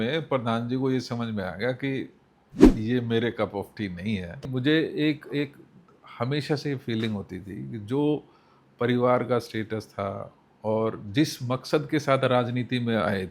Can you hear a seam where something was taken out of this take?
yes; 1 cut; at 4.5 s

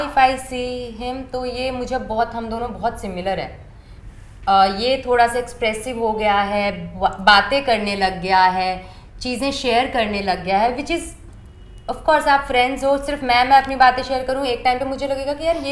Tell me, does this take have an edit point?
no; 0 cuts

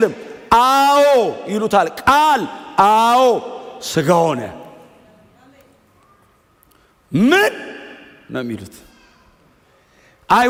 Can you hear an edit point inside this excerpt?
no; 0 cuts

